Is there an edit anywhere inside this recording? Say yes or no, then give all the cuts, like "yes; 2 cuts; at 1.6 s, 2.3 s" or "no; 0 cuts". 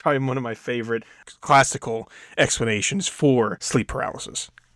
yes; 2 cuts; at 1.2 s, 3.6 s